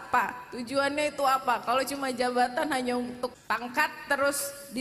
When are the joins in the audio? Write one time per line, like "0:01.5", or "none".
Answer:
0:03.3